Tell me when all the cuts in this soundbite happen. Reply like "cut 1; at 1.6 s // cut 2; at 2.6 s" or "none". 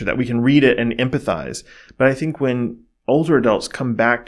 none